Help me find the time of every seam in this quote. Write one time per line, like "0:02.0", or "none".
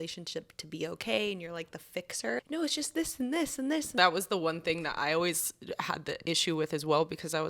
0:02.4
0:04.0